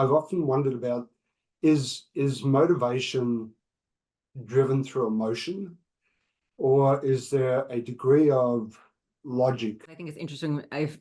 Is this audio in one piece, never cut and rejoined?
no; 1 cut; at 10.1 s

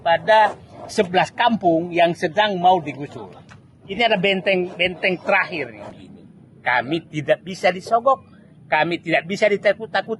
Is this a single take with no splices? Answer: no; 2 cuts; at 3.8 s, 5.9 s

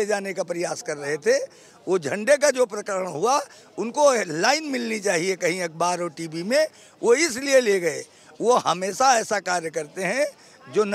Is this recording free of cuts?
yes; 0 cuts

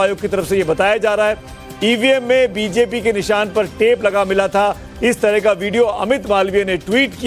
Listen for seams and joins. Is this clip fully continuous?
yes; 0 cuts

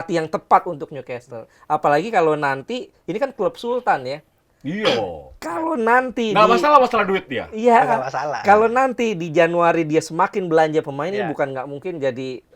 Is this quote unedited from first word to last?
yes; 0 cuts

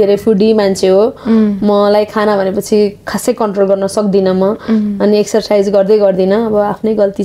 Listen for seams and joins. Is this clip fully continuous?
yes; 0 cuts

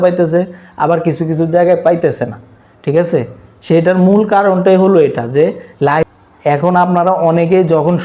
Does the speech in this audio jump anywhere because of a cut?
yes; 1 cut; at 6.1 s

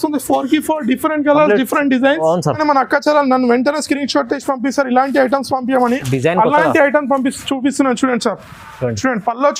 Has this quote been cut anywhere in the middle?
yes; 1 cut; at 2.5 s

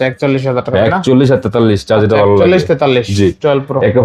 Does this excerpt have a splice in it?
no; 0 cuts

